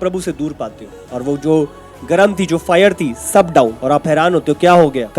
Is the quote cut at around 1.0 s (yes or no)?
yes